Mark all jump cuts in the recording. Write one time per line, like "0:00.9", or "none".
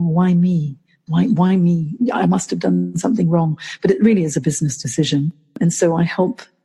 0:05.6